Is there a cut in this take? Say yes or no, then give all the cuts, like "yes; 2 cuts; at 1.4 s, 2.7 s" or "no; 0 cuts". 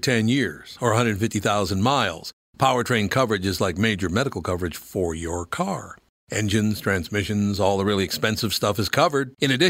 no; 0 cuts